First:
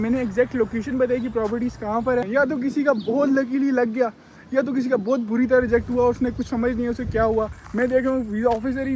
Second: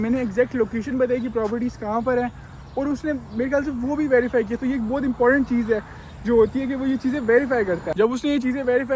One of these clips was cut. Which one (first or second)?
first